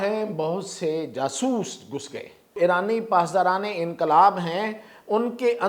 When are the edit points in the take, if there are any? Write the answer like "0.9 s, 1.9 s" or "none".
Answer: 2.6 s